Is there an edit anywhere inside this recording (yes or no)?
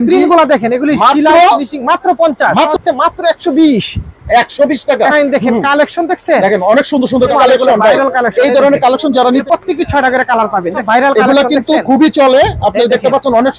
yes